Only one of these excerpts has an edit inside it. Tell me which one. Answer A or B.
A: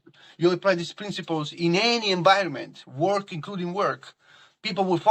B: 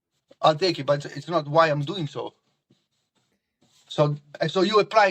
B